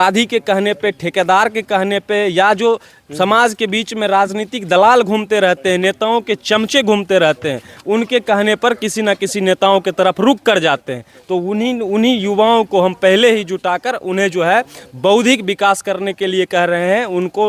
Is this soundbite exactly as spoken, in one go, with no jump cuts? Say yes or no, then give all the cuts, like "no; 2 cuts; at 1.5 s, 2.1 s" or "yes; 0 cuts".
yes; 0 cuts